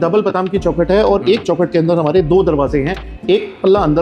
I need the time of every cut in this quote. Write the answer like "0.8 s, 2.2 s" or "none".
none